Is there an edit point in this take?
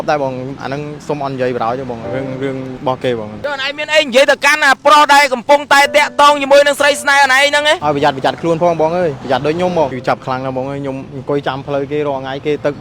yes; 2 cuts; at 3.3 s, 10.0 s

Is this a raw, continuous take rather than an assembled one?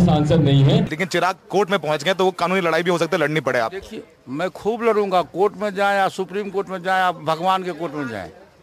no; 1 cut; at 1.0 s

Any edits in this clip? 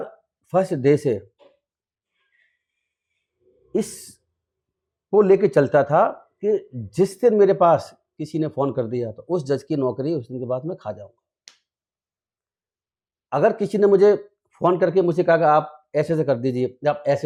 no; 0 cuts

